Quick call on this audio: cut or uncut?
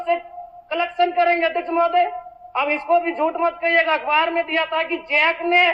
uncut